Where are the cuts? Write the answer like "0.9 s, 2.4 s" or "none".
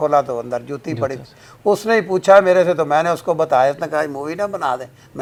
none